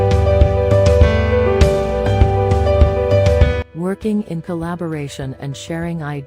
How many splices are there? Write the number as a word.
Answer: one